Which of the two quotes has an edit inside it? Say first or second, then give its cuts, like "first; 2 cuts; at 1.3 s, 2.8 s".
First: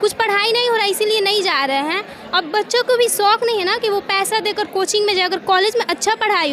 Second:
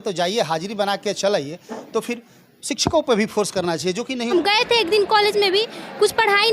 second; 1 cut; at 4.3 s